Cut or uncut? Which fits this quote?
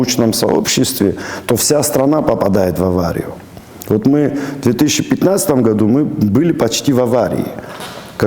uncut